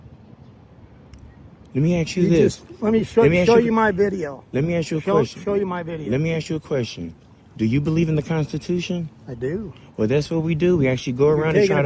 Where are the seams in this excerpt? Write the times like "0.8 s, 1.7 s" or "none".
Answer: none

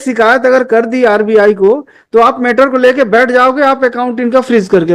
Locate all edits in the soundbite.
none

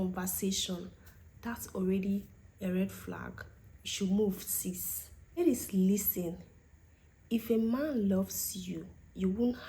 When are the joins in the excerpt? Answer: 5.3 s

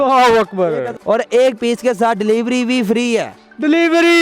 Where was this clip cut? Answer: 0.9 s

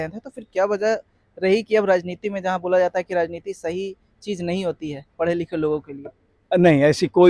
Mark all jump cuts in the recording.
none

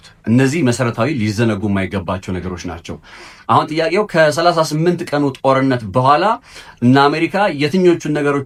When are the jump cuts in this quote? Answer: none

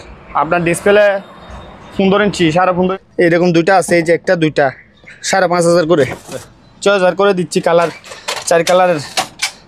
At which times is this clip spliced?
2.9 s, 6.4 s

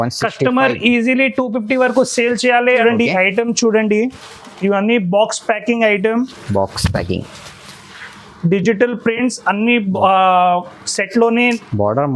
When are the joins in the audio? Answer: 2.8 s

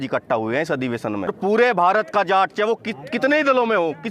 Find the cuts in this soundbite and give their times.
1.3 s

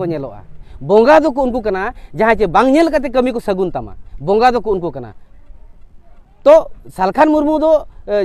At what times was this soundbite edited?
none

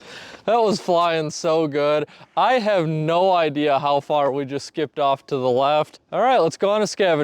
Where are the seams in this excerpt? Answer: 6.0 s

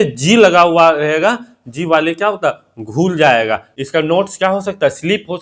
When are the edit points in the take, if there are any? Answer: 3.7 s

